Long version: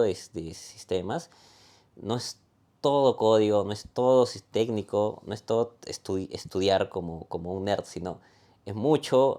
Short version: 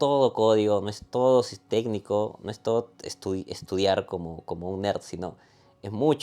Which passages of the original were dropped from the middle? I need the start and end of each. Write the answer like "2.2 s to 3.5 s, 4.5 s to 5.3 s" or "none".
none